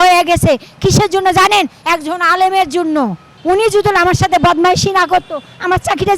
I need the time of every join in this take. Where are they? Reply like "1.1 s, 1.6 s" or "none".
3.3 s